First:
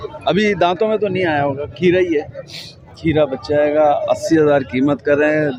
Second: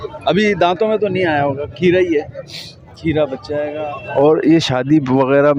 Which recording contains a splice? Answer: second; 1 cut; at 3.7 s

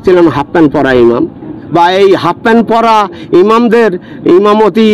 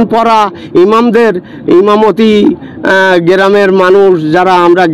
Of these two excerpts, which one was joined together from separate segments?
first; 1 cut; at 1.6 s

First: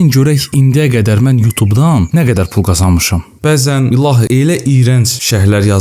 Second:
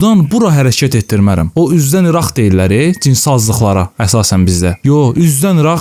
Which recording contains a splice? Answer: first; 2 cuts; at 2.1 s, 3.3 s

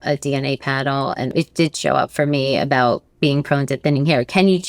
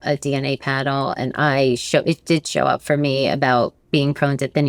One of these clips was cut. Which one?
first; 1 cut; at 1.3 s

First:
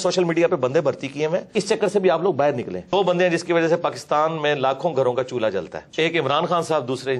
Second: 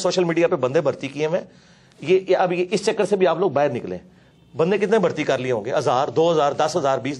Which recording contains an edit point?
first; 3 cuts; at 1.5 s, 2.9 s, 5.8 s

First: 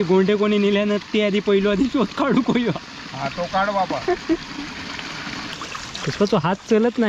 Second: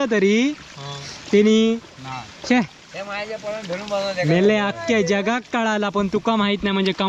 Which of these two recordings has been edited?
first; 1 cut; at 5.5 s

